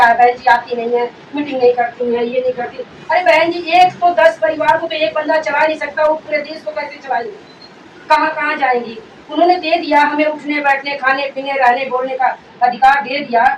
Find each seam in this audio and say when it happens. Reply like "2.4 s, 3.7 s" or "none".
none